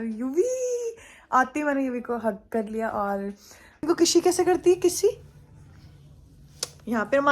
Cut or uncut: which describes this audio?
cut